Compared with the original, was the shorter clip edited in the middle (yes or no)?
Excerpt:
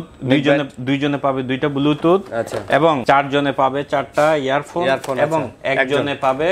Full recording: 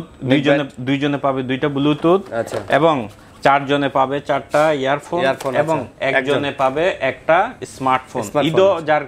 yes